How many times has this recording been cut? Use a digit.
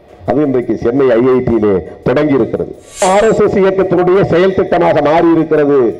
1